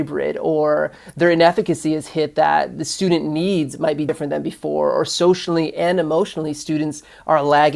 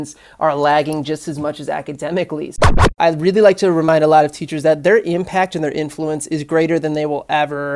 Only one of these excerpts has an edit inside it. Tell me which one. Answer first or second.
second